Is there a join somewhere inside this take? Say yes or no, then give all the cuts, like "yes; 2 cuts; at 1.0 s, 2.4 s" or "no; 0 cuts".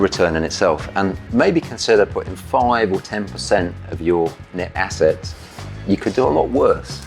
yes; 1 cut; at 1.2 s